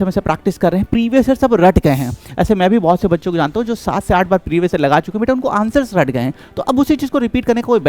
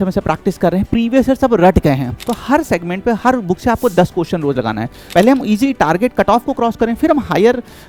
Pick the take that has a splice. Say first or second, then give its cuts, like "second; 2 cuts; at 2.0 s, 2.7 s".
second; 2 cuts; at 2.2 s, 5.0 s